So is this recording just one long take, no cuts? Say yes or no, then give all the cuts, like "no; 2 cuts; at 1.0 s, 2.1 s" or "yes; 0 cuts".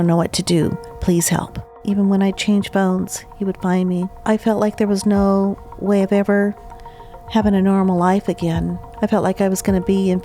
no; 3 cuts; at 1.8 s, 4.1 s, 8.8 s